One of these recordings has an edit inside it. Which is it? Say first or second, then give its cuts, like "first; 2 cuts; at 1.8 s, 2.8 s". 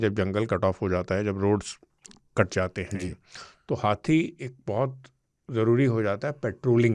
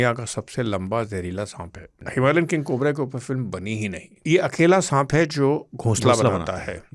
second; 2 cuts; at 1.9 s, 4.1 s